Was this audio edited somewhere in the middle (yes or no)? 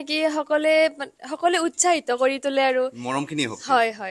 no